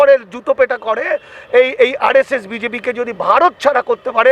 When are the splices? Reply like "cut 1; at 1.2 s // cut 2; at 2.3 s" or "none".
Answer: none